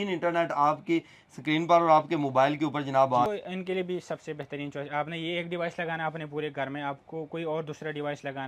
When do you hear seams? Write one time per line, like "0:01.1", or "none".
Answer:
0:03.3